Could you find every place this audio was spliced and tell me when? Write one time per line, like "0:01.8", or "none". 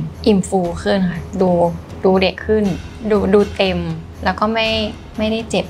0:02.9
0:04.0